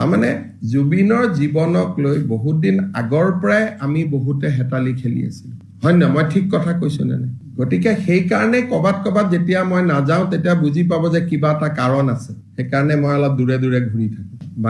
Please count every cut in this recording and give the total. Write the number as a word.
zero